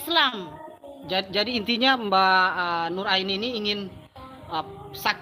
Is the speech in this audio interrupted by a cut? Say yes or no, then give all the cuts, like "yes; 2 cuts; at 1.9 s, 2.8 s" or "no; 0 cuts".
no; 0 cuts